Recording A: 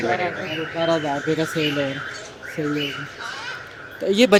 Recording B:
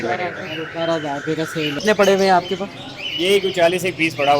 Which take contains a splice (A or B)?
B